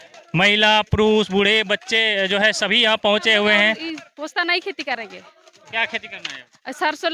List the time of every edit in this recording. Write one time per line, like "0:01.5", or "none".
0:03.9